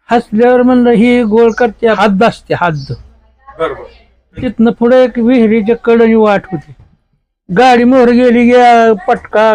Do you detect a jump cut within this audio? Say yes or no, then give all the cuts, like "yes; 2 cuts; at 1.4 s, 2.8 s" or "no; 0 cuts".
yes; 2 cuts; at 2.0 s, 4.5 s